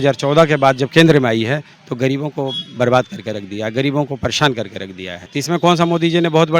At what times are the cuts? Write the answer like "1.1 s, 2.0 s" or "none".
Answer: 5.1 s

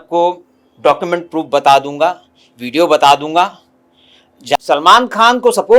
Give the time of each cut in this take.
4.6 s

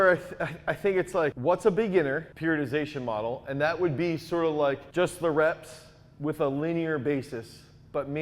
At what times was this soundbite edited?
1.4 s, 2.3 s, 4.8 s

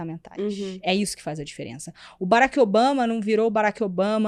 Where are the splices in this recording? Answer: none

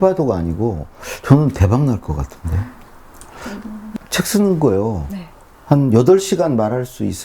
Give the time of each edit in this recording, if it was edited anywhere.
3.9 s

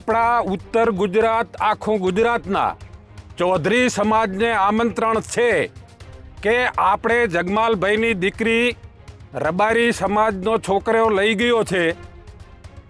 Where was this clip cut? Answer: none

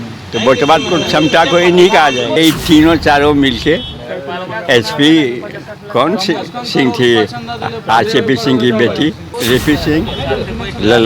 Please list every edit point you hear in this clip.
2.4 s, 9.3 s

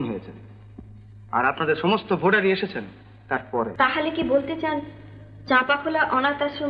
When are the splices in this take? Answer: 3.7 s

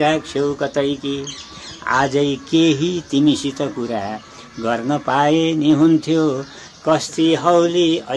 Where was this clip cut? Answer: none

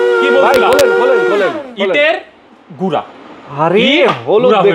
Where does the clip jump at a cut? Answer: none

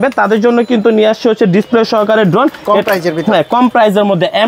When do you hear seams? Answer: none

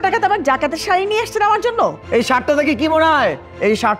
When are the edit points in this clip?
2.0 s

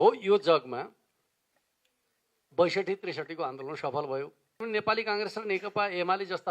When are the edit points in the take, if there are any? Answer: 4.6 s

